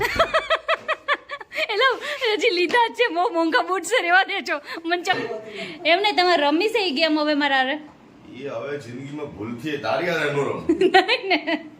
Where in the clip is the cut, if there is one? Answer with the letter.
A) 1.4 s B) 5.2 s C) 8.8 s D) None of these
B